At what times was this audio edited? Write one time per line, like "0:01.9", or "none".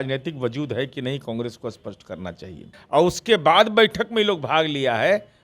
0:02.7